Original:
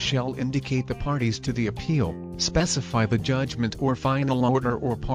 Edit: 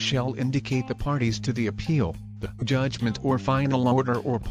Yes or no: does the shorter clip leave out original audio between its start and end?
yes